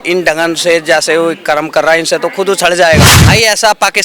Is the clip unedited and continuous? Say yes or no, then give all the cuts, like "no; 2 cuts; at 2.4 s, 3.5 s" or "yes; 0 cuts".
no; 1 cut; at 3.2 s